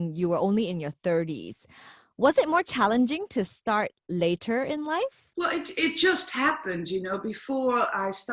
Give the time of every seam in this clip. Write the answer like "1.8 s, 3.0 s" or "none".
5.2 s